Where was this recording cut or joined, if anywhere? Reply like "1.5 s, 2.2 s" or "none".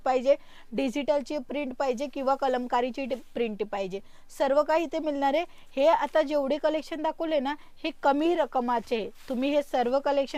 none